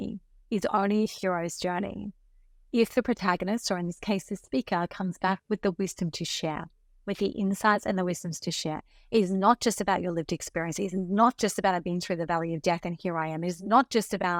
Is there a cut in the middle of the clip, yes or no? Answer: no